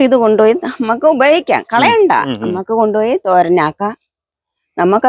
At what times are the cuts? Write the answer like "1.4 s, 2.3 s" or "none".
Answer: none